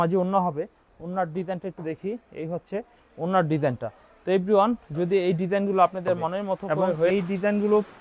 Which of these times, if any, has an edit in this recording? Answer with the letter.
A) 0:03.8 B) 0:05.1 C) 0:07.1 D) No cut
C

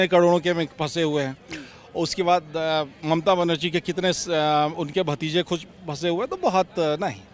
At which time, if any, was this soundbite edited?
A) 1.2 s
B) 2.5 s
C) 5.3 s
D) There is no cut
D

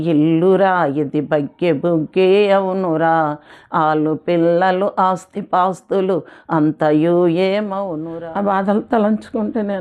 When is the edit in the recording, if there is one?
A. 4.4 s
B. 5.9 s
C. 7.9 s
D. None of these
C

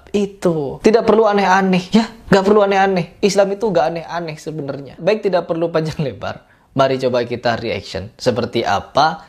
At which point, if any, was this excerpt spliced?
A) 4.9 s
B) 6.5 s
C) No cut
C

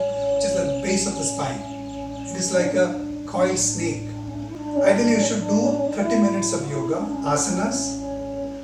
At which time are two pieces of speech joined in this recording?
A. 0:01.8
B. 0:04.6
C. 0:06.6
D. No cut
B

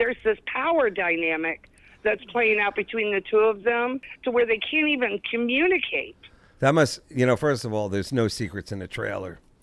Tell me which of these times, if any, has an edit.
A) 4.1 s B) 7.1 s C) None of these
A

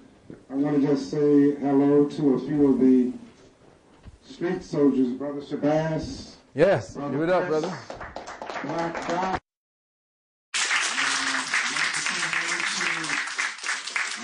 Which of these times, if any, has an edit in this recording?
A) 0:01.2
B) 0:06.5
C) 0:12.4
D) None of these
D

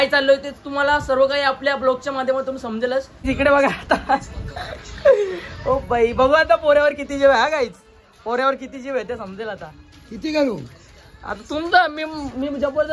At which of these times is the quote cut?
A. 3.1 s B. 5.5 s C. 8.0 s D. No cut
A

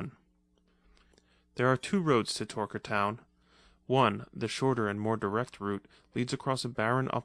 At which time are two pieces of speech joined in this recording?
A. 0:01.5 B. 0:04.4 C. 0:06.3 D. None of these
C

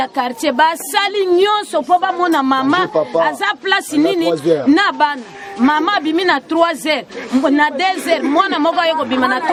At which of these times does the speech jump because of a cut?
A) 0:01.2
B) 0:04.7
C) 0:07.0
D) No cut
D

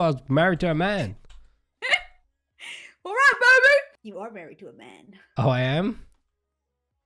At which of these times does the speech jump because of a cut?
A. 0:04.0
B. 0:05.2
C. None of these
A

